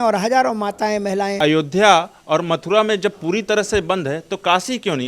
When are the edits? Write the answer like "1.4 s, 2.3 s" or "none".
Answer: 1.3 s

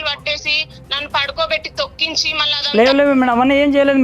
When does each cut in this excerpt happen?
2.4 s

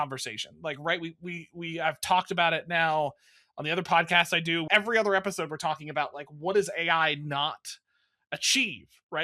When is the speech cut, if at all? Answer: 4.6 s

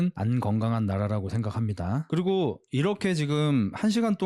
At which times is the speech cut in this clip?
2.0 s

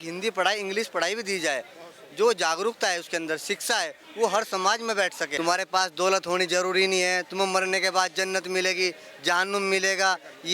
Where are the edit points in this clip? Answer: 5.2 s

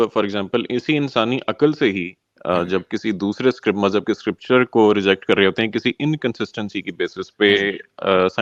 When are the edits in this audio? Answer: none

